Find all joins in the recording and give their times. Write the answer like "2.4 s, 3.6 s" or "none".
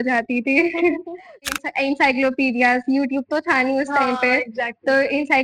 1.5 s